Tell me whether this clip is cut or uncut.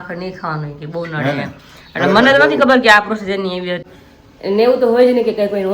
cut